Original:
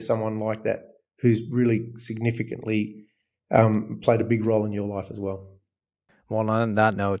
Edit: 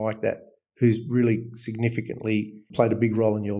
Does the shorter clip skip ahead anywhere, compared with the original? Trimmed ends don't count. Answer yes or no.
yes